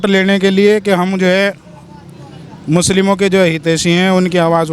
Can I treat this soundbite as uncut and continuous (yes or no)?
yes